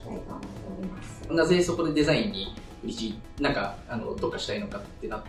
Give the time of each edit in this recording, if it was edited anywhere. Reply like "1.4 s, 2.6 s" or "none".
1.3 s